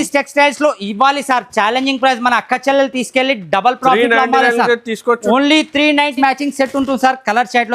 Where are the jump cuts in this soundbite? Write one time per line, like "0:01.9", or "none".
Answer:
0:06.1